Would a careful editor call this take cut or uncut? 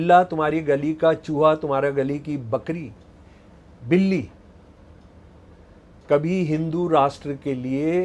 uncut